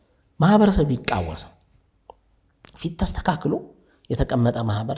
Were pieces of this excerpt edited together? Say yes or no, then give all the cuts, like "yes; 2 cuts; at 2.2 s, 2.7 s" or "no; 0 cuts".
no; 0 cuts